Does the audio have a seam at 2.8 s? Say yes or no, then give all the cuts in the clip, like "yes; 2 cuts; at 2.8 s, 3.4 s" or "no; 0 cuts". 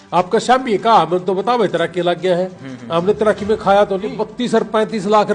no; 1 cut; at 4.2 s